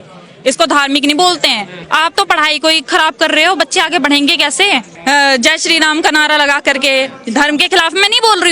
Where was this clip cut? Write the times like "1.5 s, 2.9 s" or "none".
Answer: 1.8 s, 4.9 s